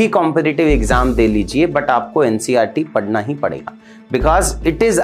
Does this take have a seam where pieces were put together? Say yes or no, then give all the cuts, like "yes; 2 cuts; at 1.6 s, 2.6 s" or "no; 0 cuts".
no; 0 cuts